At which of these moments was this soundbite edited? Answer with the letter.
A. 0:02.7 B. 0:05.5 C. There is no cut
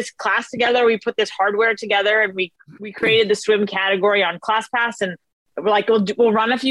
B